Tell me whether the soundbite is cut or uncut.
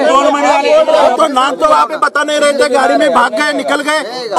cut